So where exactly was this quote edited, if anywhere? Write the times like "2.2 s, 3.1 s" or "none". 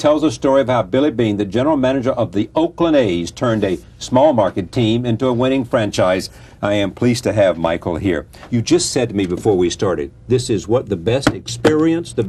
10.0 s